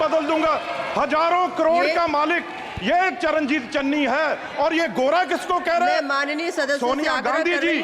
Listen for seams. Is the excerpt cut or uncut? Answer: uncut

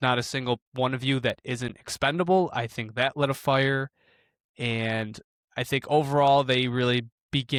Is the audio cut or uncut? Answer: uncut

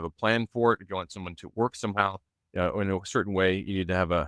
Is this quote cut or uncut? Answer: uncut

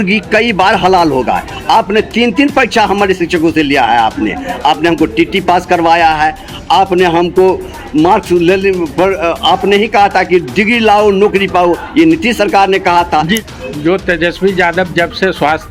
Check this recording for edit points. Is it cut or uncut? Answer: cut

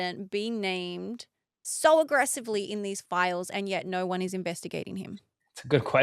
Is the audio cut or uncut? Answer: cut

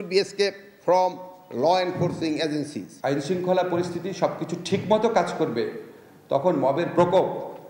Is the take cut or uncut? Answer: cut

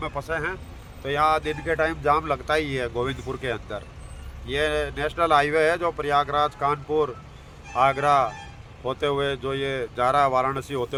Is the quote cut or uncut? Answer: uncut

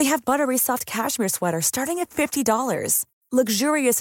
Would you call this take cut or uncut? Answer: uncut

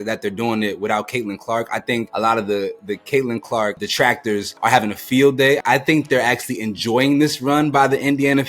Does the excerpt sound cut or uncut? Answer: cut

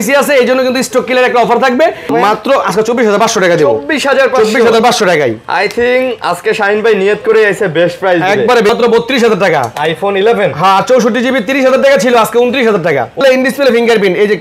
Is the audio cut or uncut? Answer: cut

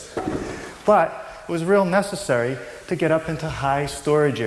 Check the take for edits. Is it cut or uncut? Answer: uncut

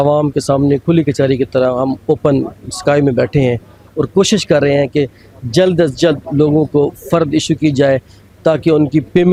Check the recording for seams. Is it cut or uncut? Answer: uncut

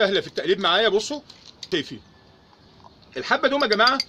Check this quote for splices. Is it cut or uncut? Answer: cut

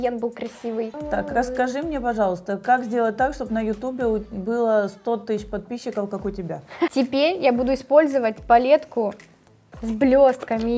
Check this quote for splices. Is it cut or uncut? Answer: cut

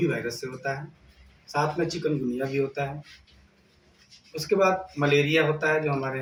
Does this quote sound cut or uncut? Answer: uncut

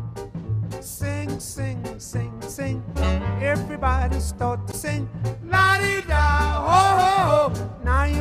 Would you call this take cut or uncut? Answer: uncut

